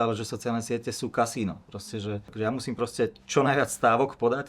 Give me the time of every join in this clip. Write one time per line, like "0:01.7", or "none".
0:02.3